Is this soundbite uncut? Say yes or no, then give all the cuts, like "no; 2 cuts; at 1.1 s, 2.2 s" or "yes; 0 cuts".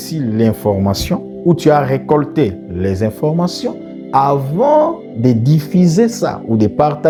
yes; 0 cuts